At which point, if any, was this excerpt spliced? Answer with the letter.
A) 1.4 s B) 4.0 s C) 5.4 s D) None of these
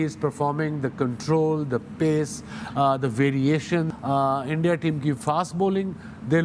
B